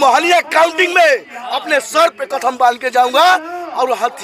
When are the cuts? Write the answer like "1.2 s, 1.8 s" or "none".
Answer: none